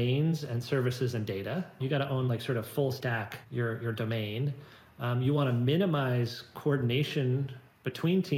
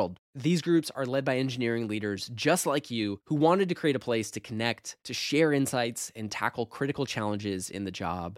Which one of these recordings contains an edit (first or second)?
first